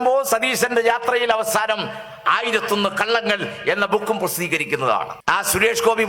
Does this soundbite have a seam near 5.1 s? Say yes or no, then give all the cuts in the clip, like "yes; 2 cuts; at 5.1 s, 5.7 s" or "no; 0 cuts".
yes; 1 cut; at 5.1 s